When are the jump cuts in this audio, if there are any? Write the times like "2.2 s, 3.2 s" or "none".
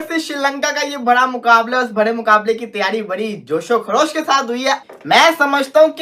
none